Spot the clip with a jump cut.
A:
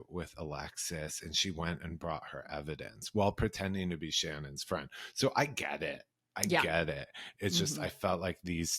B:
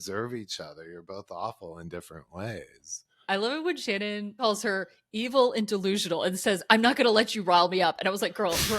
B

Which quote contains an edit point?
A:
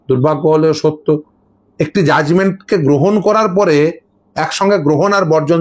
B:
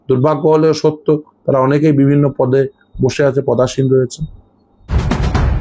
A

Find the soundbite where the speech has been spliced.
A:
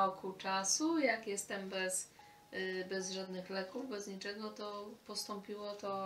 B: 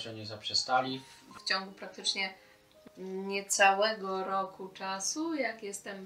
B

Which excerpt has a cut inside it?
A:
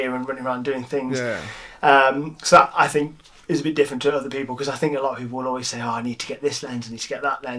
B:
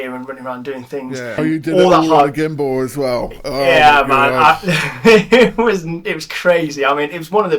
B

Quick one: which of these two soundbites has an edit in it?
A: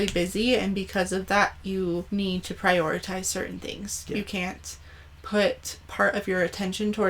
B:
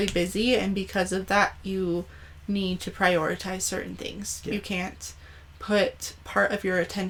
A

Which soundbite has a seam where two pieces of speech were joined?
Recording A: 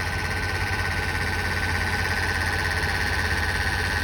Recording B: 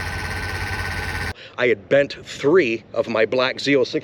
B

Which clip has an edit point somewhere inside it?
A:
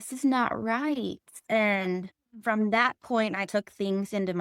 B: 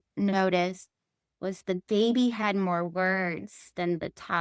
A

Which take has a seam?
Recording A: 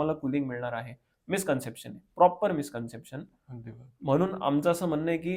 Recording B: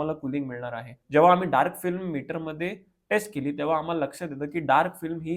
B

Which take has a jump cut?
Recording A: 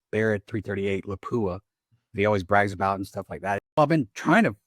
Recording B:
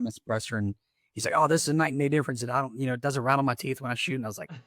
A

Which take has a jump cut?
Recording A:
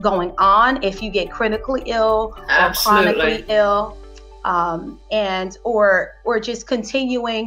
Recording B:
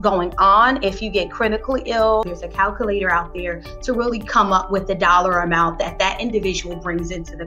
B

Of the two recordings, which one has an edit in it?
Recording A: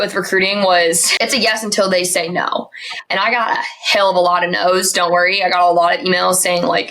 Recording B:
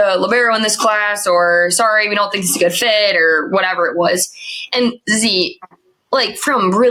A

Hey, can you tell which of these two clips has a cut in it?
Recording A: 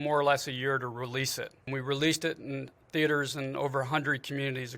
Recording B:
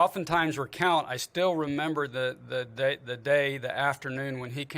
A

